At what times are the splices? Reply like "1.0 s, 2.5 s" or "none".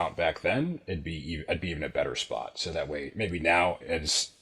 none